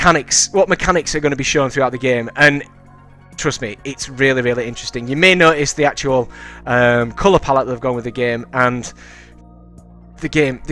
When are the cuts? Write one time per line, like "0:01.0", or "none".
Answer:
none